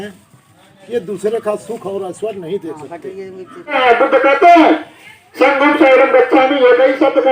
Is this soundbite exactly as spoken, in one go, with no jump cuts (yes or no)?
no